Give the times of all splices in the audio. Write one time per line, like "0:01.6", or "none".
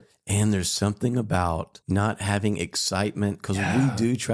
0:01.7